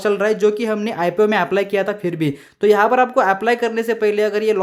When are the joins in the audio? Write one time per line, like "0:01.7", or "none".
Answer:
none